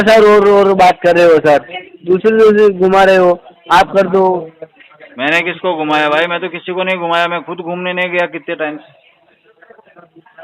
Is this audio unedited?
yes; 0 cuts

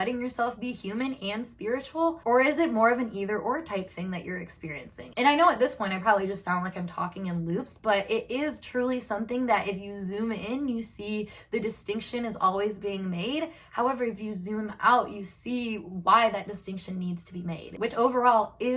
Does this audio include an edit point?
no; 0 cuts

